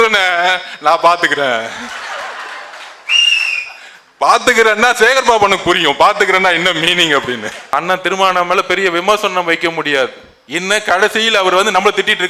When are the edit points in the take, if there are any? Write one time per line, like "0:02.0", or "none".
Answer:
0:07.7